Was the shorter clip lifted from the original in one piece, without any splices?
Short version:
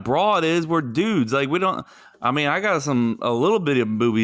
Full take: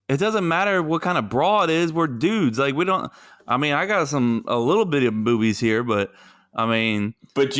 yes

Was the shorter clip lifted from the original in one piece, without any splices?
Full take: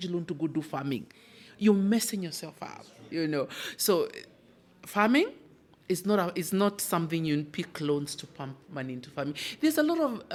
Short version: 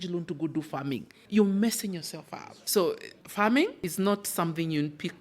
no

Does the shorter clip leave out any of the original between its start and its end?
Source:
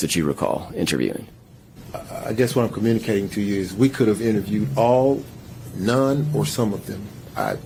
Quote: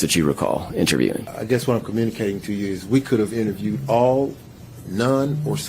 yes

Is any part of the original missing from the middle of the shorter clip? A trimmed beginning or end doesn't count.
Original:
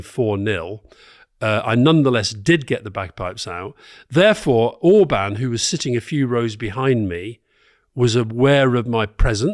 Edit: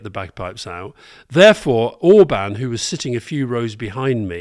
no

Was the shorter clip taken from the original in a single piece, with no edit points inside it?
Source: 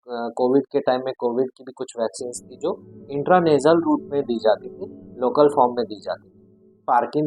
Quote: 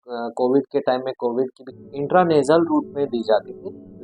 no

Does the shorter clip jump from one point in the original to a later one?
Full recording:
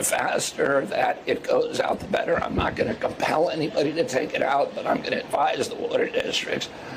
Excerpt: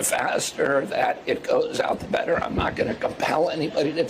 no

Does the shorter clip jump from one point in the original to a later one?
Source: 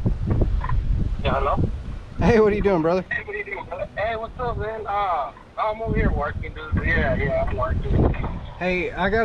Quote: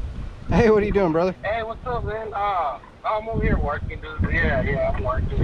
yes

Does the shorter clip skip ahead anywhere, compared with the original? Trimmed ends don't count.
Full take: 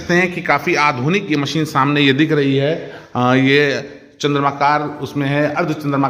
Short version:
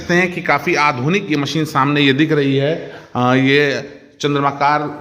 no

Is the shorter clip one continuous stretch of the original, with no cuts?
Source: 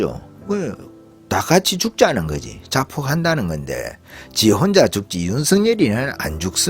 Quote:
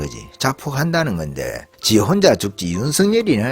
no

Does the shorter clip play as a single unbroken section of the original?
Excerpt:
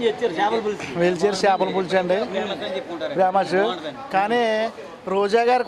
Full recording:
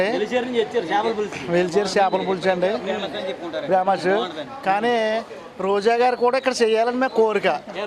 yes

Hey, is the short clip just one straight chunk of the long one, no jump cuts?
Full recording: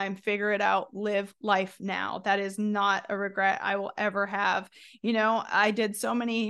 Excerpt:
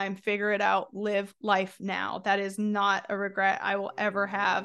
yes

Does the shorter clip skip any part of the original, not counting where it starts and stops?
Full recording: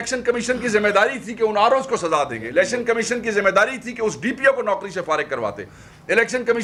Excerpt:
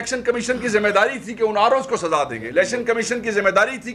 no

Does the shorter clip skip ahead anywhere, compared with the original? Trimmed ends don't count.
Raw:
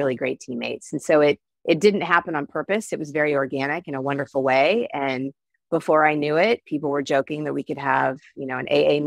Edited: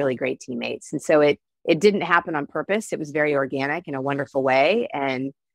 no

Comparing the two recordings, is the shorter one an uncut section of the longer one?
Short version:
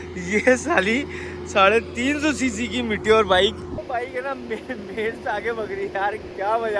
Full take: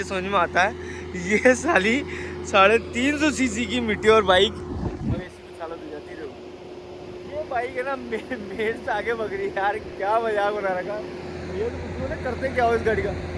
no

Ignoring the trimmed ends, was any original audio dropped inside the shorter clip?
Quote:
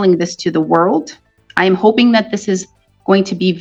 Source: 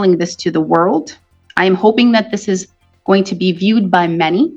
no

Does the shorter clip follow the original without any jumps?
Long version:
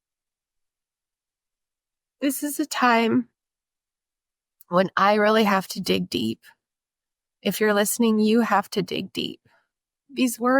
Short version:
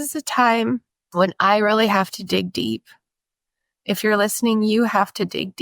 no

